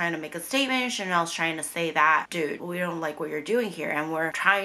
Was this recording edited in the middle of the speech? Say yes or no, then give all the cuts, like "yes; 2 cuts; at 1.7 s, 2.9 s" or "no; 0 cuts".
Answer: yes; 1 cut; at 2.6 s